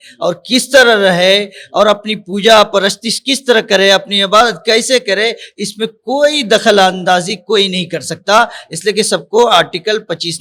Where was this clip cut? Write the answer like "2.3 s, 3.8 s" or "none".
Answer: none